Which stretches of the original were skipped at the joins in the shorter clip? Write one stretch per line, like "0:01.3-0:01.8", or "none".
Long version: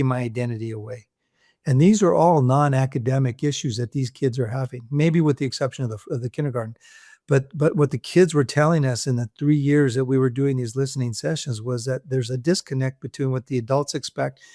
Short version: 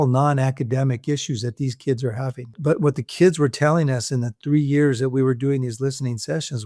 0:04.9-0:07.5